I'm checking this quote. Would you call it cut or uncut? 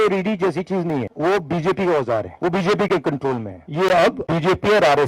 cut